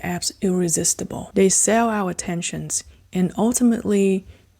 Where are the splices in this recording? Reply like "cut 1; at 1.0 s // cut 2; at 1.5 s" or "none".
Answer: cut 1; at 1.2 s